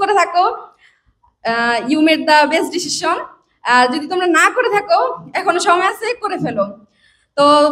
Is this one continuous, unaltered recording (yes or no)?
yes